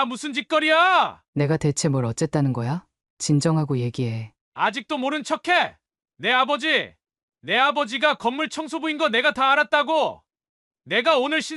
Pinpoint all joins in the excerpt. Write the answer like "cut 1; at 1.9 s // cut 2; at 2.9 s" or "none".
cut 1; at 1.2 s

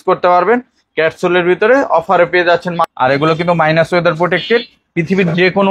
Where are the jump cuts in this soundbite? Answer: cut 1; at 2.9 s

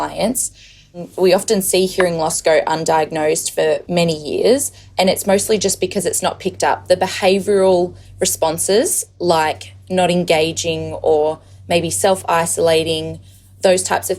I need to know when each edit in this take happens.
cut 1; at 1.1 s

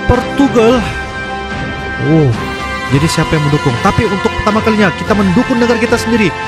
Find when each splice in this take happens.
none

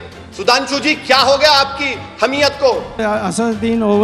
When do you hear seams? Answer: cut 1; at 2.9 s

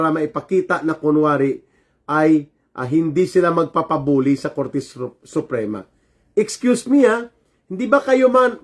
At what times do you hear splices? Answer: none

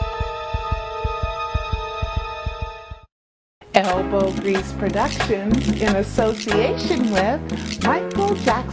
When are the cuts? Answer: cut 1; at 3.8 s

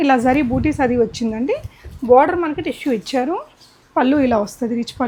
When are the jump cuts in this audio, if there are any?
none

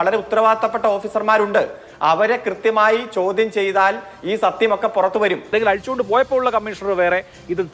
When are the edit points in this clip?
cut 1; at 5.5 s

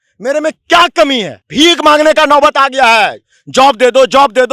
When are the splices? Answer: cut 1; at 1.4 s

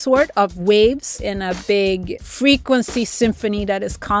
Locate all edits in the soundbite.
cut 1; at 1.3 s // cut 2; at 2.2 s

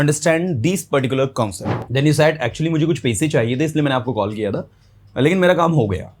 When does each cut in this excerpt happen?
cut 1; at 1.6 s

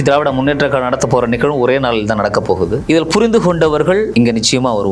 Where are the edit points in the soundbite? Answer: cut 1; at 2.8 s // cut 2; at 4.1 s

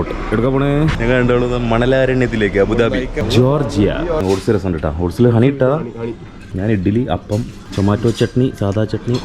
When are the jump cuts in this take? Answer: cut 1; at 1.0 s // cut 2; at 3.2 s // cut 3; at 4.2 s // cut 4; at 6.4 s // cut 5; at 7.6 s

